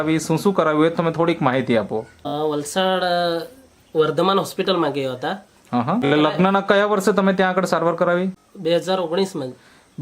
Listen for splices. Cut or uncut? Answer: cut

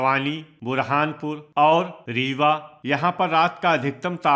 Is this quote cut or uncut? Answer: cut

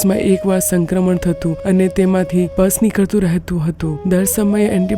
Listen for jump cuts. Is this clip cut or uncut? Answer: uncut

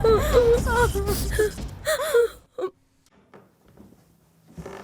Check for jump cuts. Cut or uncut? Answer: uncut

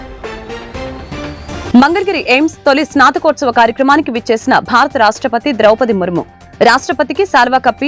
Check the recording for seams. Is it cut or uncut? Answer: uncut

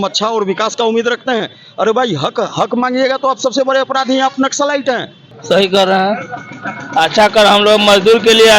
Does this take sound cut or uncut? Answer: cut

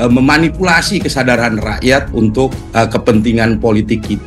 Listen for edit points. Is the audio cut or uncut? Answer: uncut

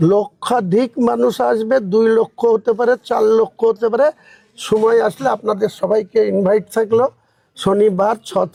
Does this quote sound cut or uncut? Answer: uncut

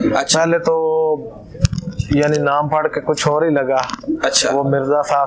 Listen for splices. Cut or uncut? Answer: uncut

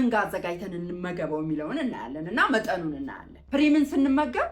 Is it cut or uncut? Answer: cut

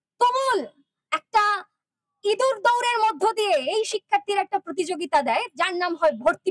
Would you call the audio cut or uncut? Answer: uncut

